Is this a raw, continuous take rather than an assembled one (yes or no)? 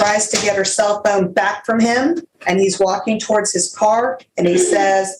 no